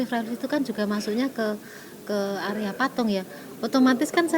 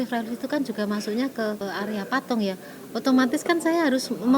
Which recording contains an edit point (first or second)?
second